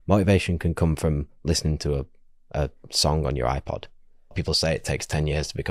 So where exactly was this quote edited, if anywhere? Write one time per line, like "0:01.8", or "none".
0:04.3